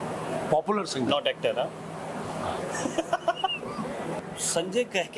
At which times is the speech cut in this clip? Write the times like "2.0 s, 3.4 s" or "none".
4.2 s